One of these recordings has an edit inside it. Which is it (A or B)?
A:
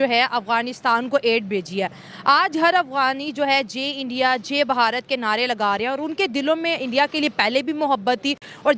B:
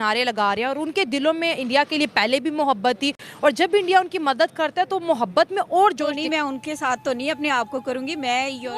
B